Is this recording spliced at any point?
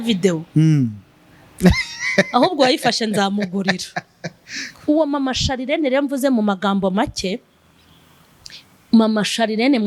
yes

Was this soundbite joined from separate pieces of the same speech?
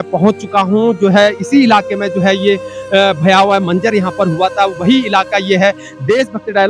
no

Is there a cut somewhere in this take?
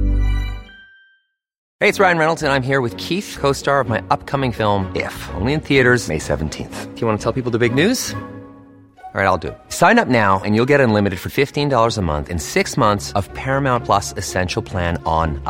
yes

